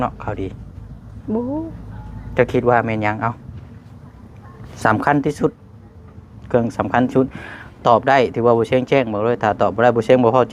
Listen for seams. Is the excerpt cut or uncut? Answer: uncut